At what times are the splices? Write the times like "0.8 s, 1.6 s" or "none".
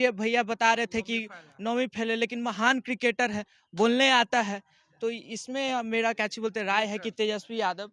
none